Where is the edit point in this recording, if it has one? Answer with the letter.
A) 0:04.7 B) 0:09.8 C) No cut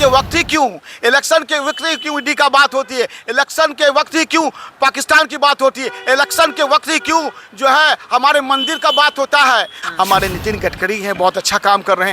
B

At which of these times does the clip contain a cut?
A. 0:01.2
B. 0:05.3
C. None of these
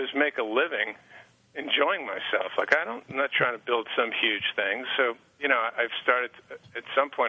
B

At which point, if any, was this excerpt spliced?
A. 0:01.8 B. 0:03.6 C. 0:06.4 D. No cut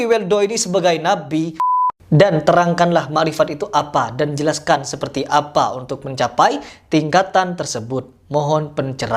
A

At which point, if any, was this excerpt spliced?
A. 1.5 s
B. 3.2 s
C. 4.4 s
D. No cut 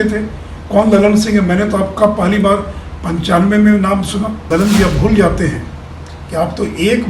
C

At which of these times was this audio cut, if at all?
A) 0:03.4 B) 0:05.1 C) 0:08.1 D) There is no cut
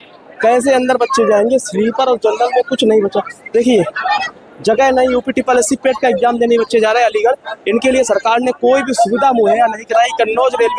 D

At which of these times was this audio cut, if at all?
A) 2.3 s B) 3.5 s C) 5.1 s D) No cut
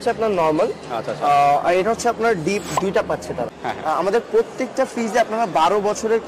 B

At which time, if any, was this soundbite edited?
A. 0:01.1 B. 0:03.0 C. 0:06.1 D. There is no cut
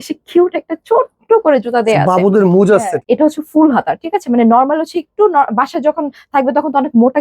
B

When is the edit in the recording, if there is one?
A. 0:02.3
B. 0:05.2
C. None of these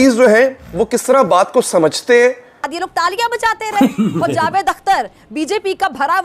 A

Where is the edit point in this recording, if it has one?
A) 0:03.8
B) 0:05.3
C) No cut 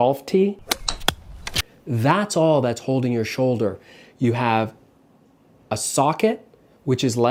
C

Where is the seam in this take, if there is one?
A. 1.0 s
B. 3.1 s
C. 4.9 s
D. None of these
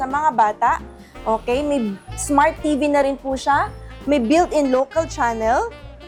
D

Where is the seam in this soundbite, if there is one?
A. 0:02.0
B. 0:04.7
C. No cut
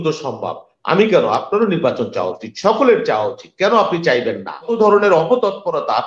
B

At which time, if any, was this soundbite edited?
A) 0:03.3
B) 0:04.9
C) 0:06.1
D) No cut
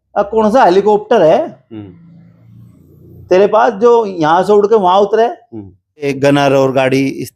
C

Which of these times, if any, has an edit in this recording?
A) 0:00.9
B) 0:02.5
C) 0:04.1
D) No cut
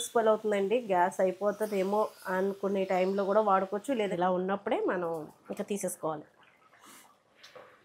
C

